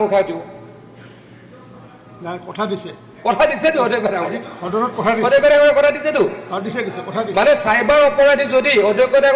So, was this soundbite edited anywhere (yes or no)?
no